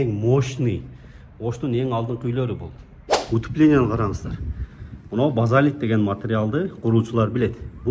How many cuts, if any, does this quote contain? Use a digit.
1